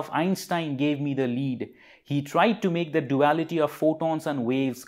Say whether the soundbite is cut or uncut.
uncut